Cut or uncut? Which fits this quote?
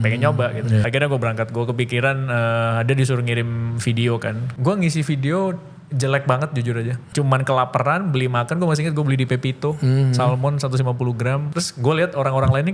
cut